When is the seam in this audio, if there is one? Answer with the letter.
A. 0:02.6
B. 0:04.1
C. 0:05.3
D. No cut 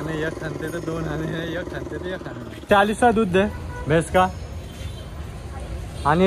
A